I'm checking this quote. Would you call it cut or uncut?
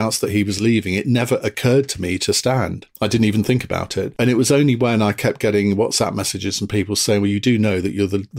uncut